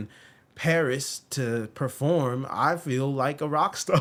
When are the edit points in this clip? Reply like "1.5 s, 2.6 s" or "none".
none